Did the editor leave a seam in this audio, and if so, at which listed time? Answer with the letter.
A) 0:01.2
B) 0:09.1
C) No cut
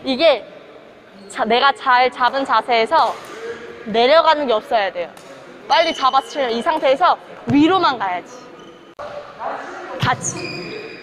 B